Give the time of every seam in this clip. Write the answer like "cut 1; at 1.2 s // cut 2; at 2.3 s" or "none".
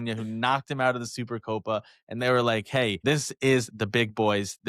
cut 1; at 3.0 s

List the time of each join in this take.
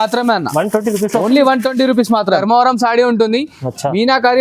cut 1; at 2.4 s

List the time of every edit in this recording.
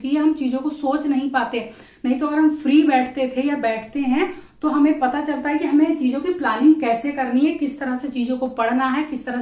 none

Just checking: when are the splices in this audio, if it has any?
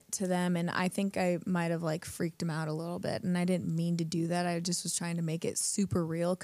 none

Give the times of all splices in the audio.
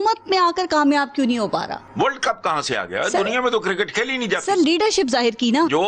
cut 1; at 1.8 s

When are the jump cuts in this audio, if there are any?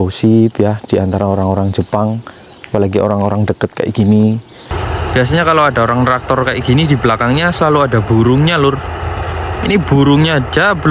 cut 1; at 4.8 s

